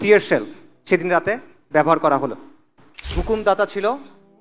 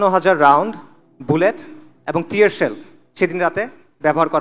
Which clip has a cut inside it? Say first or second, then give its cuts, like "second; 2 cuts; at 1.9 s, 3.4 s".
first; 1 cut; at 3.2 s